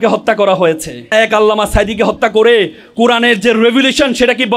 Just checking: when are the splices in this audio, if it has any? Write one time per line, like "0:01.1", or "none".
0:01.1